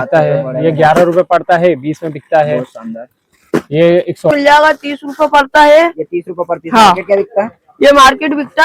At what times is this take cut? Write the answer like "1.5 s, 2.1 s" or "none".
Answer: 4.3 s

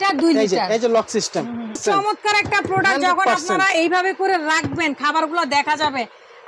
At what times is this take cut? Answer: 1.8 s

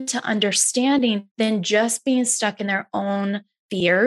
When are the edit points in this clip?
1.3 s

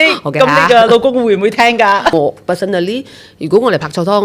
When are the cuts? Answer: 2.1 s

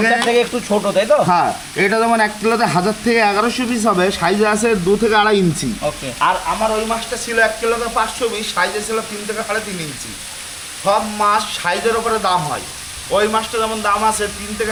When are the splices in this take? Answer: none

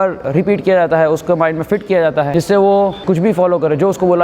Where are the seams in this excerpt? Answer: 2.3 s, 3.0 s

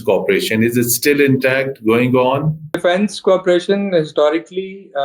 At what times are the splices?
2.8 s

